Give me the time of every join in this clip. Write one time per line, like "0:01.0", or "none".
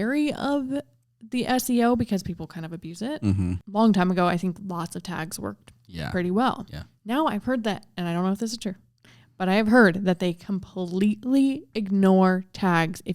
0:03.5